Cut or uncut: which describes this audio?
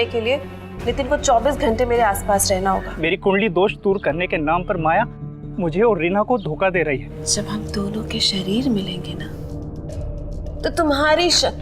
cut